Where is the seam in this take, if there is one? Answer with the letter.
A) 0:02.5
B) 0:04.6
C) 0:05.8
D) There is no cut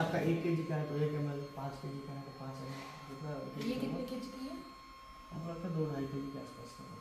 D